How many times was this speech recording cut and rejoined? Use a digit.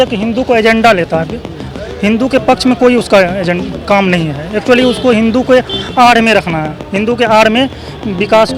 0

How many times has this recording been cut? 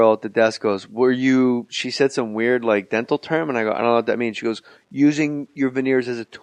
0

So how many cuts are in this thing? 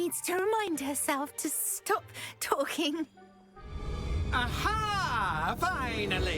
1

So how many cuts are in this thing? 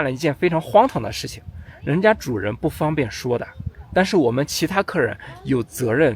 0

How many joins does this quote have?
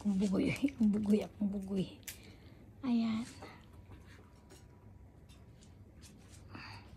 0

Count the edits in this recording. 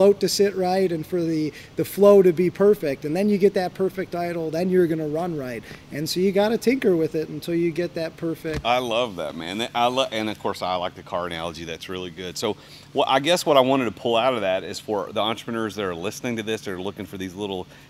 0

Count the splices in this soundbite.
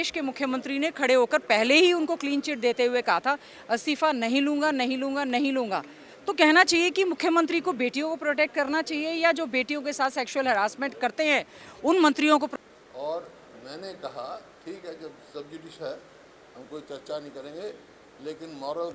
1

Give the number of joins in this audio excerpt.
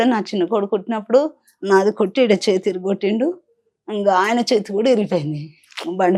0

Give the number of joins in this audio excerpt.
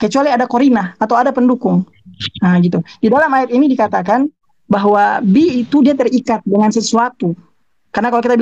1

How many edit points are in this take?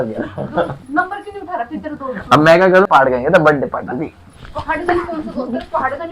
1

